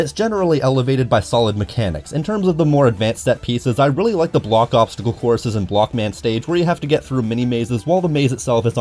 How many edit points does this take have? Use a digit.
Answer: 0